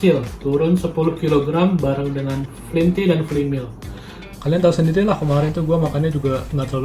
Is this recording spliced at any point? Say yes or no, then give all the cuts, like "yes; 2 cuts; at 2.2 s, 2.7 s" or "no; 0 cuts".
yes; 1 cut; at 3.9 s